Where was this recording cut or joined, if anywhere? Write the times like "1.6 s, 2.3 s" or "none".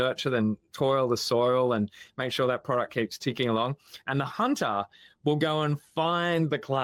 none